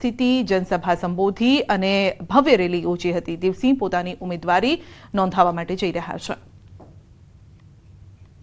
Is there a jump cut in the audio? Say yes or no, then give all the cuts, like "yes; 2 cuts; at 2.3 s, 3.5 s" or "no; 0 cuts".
yes; 1 cut; at 5.3 s